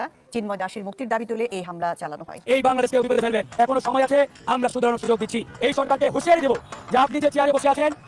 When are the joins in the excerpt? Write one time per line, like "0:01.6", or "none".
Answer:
0:02.5